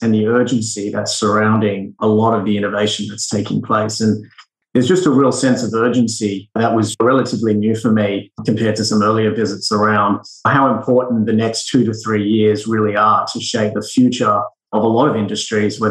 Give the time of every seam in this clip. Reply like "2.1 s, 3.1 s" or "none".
4.5 s